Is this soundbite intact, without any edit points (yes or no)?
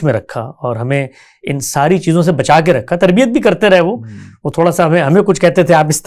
yes